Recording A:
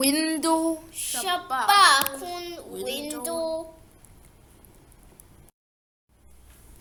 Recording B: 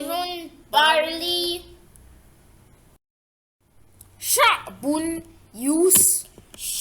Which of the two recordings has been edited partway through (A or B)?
B